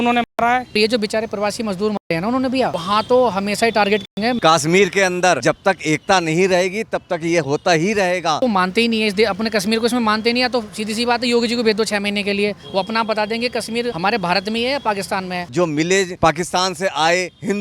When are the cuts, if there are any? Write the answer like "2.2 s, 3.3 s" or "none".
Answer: 0.8 s, 4.4 s, 8.4 s, 15.5 s